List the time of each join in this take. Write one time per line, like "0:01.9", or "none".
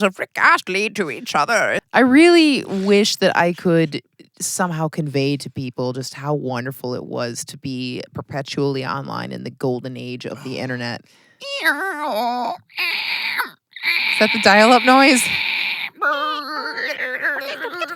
0:01.8